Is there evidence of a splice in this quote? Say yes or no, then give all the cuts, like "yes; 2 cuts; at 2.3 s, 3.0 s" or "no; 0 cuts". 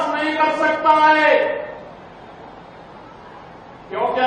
no; 0 cuts